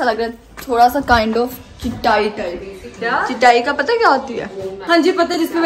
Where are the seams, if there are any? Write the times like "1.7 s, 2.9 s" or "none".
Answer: none